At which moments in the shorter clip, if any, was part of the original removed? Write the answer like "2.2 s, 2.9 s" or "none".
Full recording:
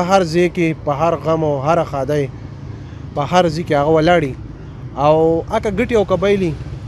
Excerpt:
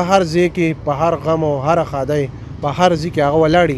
2.4 s